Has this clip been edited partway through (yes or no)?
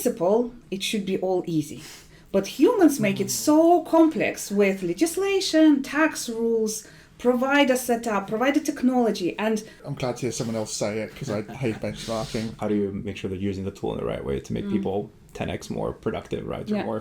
yes